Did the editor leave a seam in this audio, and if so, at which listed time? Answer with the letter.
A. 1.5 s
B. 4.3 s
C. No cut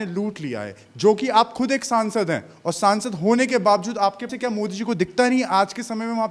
B